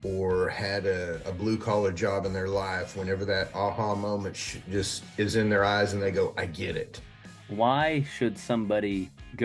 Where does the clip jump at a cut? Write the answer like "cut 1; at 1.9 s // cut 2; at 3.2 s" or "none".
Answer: cut 1; at 7.4 s